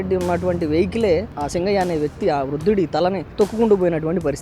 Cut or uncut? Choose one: cut